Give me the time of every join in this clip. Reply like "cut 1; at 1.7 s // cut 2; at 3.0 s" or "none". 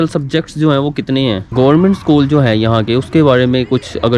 cut 1; at 1.5 s